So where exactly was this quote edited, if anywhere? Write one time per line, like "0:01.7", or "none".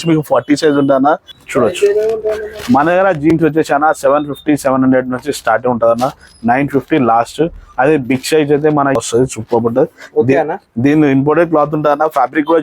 0:01.3
0:09.0